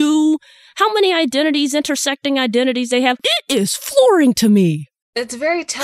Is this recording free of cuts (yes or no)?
no